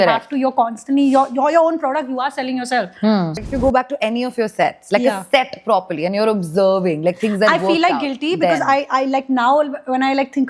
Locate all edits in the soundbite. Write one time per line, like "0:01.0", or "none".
0:03.4